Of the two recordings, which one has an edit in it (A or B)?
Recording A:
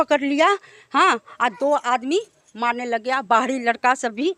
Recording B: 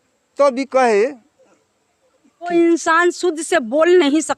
B